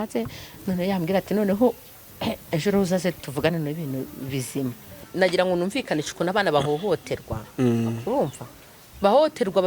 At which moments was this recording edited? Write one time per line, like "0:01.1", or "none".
0:05.0